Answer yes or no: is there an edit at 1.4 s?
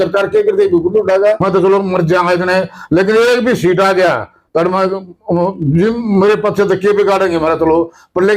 yes